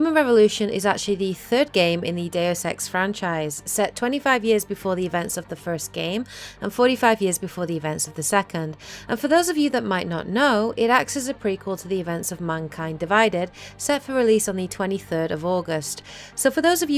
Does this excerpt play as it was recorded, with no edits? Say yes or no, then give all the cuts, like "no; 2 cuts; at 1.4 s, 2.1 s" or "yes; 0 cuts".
no; 1 cut; at 11.4 s